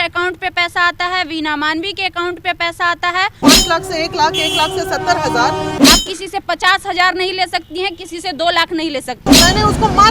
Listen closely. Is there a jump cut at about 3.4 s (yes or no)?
yes